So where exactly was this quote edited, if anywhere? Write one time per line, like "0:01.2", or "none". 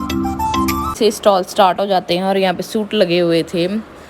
0:00.9